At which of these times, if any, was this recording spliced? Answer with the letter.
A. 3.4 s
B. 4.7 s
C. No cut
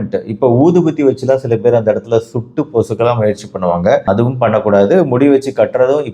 C